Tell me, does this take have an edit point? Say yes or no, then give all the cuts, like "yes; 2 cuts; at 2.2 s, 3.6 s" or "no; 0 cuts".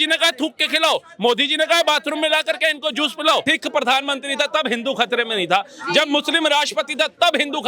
yes; 1 cut; at 3.4 s